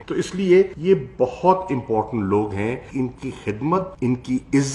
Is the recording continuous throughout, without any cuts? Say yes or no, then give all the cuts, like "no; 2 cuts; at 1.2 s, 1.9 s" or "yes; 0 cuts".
yes; 0 cuts